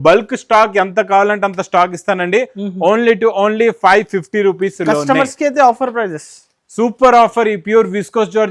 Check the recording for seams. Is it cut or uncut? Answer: uncut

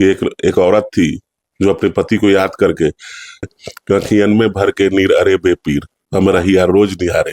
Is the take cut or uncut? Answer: cut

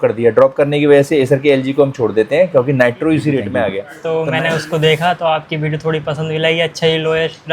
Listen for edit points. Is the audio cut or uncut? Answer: cut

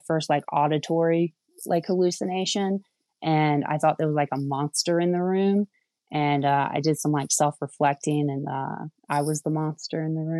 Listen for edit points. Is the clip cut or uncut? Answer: uncut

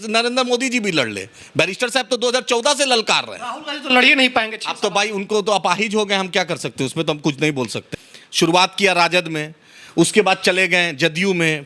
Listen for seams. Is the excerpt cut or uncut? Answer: cut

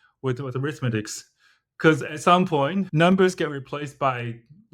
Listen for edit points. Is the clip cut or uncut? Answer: cut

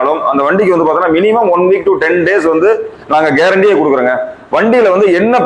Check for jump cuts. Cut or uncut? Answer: uncut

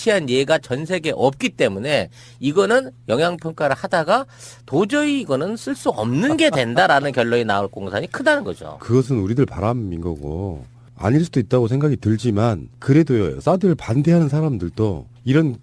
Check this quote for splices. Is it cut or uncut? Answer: uncut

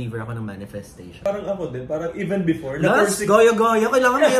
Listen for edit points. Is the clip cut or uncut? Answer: cut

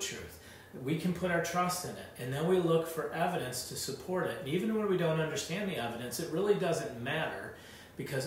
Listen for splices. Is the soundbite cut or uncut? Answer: uncut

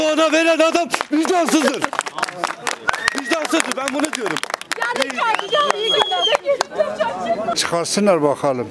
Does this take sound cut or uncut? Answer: uncut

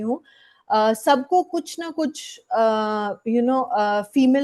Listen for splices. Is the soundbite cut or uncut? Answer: uncut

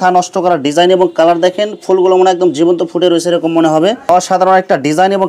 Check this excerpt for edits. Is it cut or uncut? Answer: cut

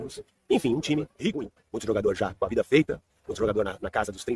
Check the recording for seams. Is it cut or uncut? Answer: cut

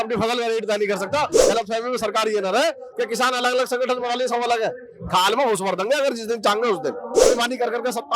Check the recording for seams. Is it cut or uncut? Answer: cut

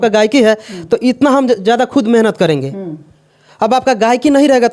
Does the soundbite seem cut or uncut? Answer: uncut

